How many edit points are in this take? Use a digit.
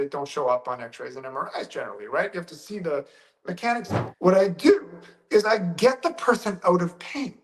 1